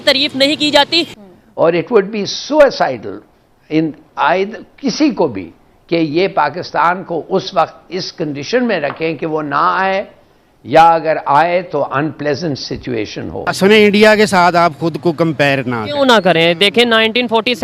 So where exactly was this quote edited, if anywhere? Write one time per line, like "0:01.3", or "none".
0:01.2
0:13.5